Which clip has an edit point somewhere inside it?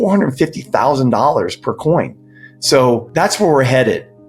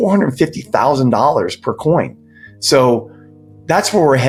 first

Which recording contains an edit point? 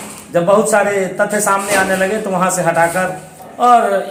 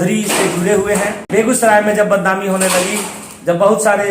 second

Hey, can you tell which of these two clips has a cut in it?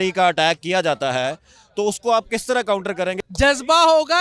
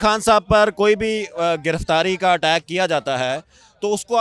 first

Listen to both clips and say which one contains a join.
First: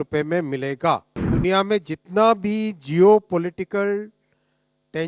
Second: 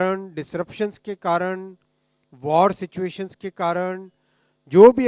first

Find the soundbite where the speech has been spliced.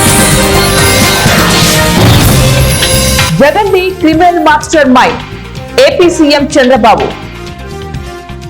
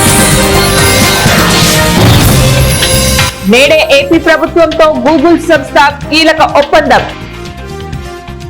first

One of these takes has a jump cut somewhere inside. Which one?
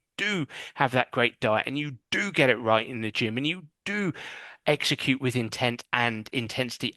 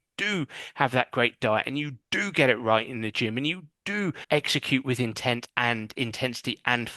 second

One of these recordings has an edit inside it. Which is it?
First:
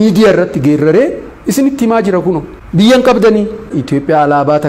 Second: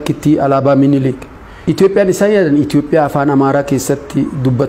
first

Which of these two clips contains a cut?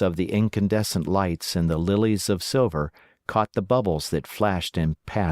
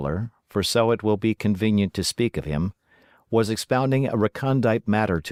first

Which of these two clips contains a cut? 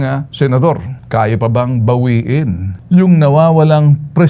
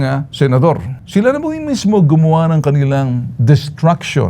first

